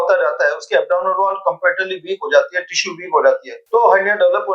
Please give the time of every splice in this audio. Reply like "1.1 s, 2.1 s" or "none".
none